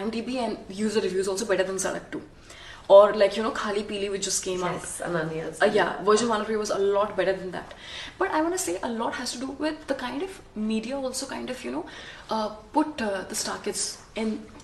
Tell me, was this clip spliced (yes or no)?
no